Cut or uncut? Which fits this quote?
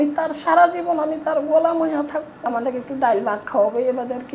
cut